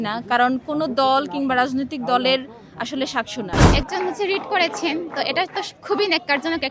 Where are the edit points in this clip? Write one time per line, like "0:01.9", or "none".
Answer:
0:03.6

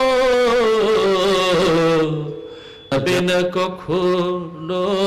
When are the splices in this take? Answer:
0:02.9

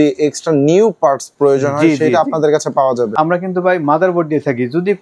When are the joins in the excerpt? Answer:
0:03.1

